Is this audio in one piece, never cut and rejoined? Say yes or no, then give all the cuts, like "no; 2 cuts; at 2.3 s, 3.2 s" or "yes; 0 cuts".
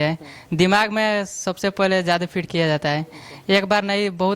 yes; 0 cuts